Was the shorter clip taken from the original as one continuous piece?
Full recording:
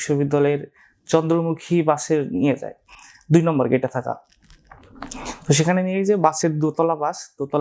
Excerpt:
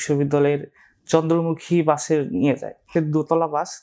no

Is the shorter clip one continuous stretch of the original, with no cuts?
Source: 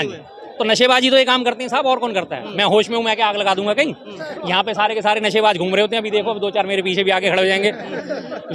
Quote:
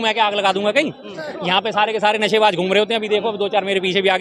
yes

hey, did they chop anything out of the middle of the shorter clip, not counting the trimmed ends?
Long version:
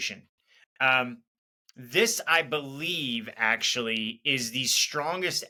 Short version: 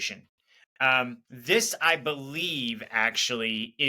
yes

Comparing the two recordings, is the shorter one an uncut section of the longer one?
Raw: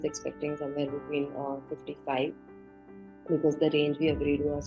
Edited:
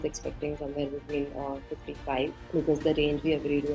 no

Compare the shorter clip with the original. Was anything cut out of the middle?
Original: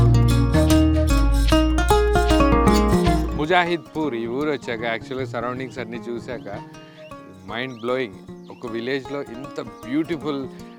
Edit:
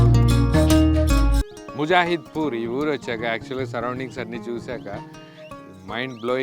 yes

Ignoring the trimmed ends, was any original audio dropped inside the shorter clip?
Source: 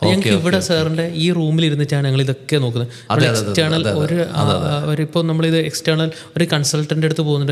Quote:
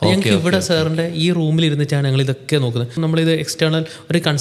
yes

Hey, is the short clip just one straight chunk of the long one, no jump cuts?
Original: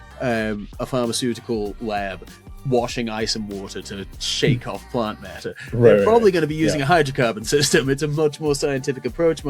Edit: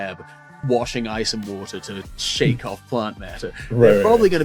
yes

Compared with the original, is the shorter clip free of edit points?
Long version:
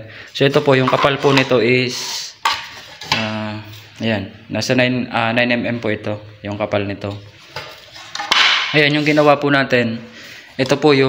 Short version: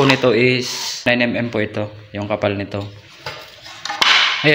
no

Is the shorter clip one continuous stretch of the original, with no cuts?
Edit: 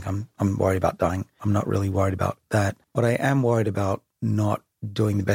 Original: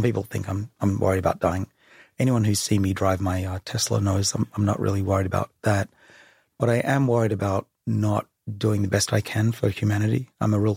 no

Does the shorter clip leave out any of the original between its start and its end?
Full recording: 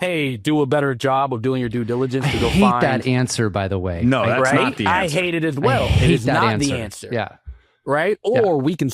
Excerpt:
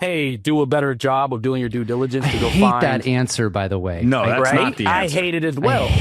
no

